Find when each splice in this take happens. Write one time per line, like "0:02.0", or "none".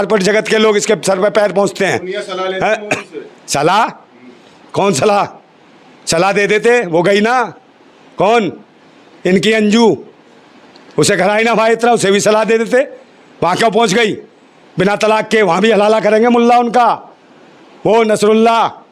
none